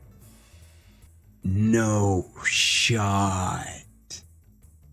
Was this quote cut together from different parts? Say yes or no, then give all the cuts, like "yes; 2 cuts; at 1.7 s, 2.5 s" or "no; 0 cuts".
yes; 1 cut; at 1.1 s